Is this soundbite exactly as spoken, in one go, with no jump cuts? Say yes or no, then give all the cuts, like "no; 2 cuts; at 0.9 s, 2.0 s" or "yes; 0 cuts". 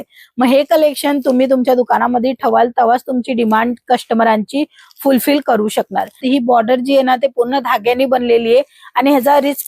no; 1 cut; at 6.2 s